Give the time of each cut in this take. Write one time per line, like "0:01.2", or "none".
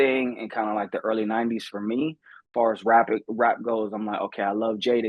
0:02.3